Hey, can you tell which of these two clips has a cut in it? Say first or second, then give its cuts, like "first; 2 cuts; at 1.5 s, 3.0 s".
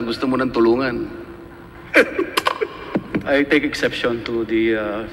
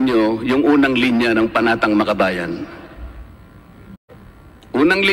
second; 1 cut; at 4.1 s